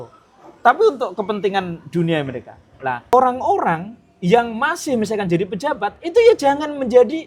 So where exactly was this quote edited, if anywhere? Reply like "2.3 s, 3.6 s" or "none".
3.1 s